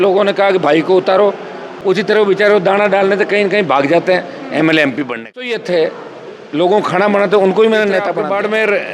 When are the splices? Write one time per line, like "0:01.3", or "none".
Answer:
0:01.7
0:05.6
0:08.0